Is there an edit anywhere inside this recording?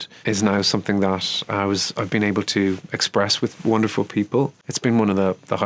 yes; 1 cut; at 4.7 s

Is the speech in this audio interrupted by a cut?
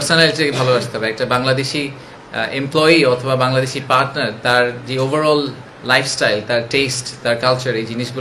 no; 0 cuts

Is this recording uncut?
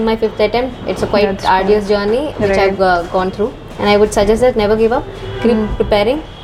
yes; 0 cuts

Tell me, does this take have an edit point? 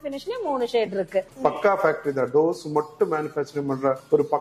yes; 1 cut; at 1.3 s

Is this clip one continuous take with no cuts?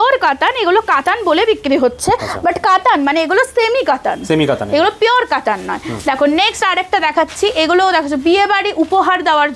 yes; 0 cuts

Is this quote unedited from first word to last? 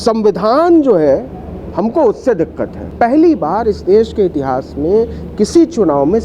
no; 1 cut; at 2.8 s

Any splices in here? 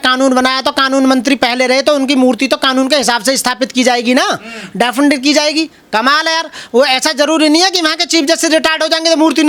no; 0 cuts

